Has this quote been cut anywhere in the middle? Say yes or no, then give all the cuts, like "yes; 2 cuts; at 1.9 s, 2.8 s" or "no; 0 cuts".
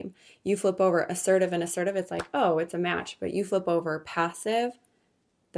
no; 0 cuts